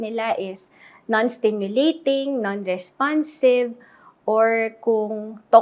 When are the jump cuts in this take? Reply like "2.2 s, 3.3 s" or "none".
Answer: none